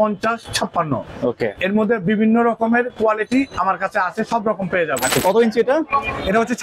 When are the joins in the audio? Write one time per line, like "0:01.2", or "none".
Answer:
0:05.1